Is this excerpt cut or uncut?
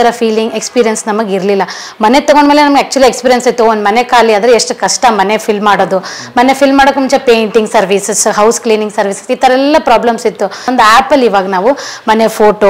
cut